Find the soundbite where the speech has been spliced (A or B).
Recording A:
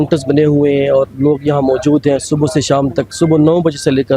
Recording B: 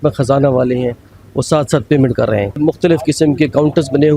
B